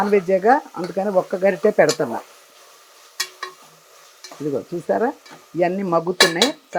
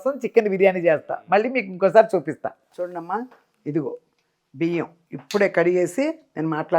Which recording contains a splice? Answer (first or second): second